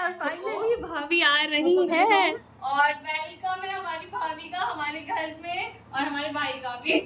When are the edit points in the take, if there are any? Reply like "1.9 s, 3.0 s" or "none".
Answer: 2.5 s